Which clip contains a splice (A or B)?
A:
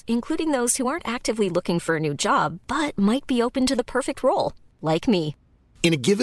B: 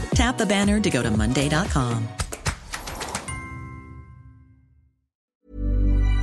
B